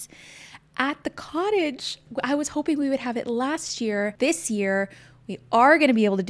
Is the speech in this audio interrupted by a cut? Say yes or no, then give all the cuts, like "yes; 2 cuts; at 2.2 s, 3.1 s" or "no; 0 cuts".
yes; 2 cuts; at 2.0 s, 4.1 s